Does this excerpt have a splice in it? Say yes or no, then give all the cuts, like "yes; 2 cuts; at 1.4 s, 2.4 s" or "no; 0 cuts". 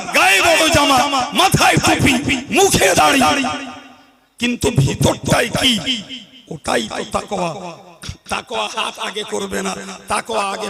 yes; 1 cut; at 0.9 s